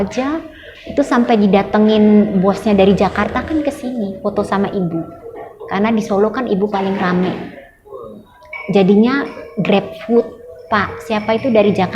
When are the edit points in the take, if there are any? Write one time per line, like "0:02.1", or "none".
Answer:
none